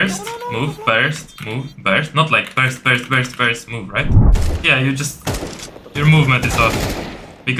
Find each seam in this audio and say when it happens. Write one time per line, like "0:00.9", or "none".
0:04.2